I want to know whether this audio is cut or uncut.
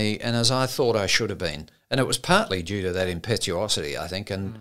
uncut